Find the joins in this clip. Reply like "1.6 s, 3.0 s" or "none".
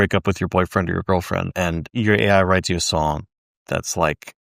1.9 s